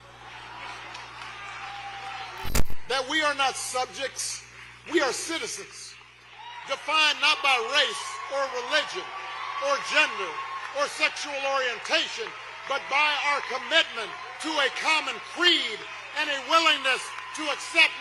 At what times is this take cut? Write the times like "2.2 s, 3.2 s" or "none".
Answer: 2.5 s